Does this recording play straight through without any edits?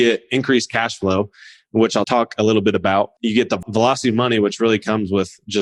no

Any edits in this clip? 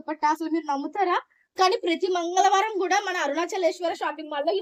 no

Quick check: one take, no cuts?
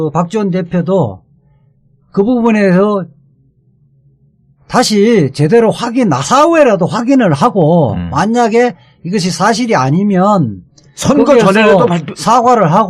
no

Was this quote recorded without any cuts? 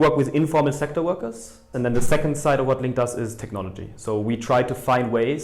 no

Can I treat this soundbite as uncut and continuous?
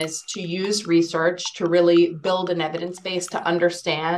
yes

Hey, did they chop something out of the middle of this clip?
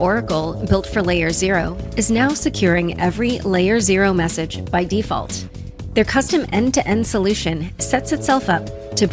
no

